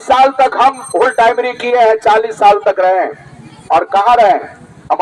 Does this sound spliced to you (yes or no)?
no